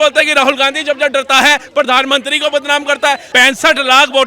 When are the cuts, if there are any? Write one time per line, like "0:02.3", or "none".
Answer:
0:03.3